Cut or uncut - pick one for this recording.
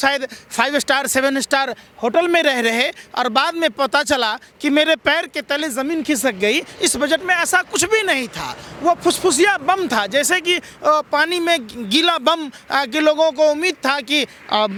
uncut